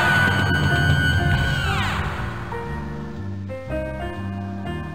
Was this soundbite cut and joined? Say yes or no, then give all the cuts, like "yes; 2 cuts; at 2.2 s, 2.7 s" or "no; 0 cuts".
no; 0 cuts